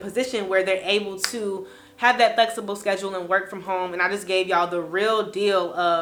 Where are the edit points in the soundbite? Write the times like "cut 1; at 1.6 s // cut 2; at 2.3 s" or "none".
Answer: none